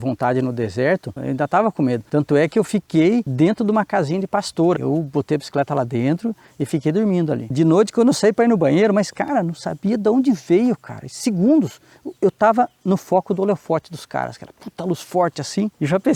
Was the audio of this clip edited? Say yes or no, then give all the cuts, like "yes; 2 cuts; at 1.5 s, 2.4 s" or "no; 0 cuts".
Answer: no; 0 cuts